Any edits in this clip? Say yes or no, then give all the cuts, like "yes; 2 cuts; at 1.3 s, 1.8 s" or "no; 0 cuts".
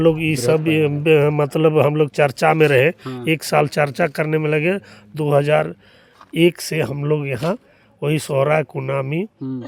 no; 0 cuts